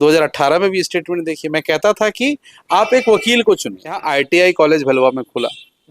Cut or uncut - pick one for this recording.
cut